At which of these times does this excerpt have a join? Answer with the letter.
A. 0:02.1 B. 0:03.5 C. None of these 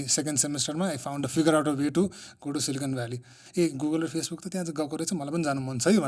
B